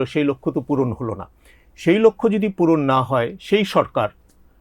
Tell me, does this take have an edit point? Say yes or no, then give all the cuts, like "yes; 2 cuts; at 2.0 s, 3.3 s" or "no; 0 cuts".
no; 0 cuts